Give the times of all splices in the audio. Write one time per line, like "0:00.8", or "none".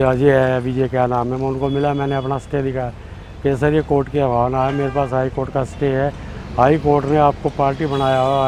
none